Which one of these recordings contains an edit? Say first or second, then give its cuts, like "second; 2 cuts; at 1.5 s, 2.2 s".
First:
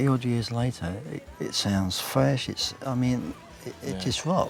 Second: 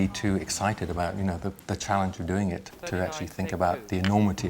second; 1 cut; at 2.7 s